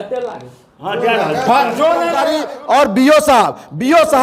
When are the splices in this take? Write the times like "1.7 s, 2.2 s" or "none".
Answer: 2.4 s

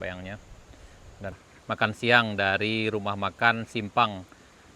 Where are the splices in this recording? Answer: 1.4 s

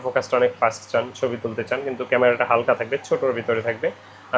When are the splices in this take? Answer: none

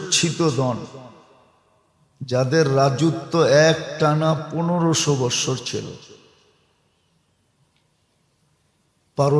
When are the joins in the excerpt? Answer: none

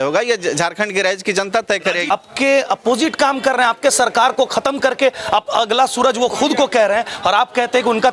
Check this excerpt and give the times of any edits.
2.1 s

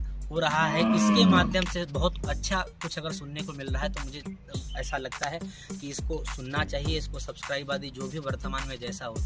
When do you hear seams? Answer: none

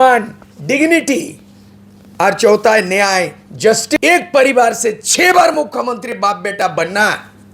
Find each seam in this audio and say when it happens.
3.9 s

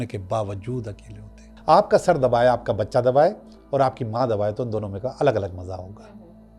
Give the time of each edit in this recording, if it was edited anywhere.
1.5 s

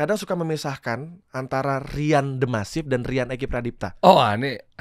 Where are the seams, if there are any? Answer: 3.9 s

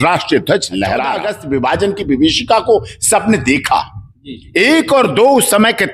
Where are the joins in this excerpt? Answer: 1.3 s

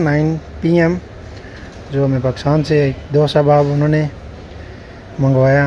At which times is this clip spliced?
none

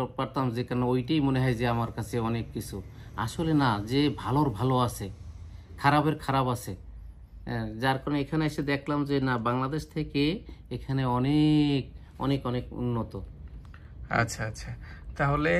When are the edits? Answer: none

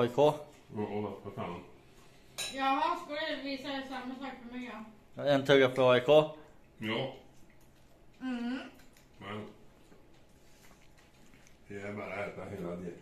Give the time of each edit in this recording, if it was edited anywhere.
none

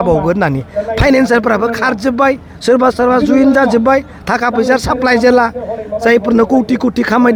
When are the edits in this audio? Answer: none

